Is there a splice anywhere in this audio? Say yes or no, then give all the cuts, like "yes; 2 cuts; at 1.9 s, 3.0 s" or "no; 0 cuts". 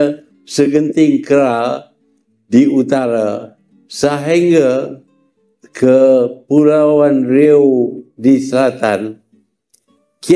no; 0 cuts